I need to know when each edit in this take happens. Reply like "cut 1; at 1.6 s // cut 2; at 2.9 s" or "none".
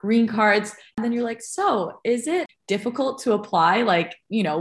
cut 1; at 0.9 s // cut 2; at 2.5 s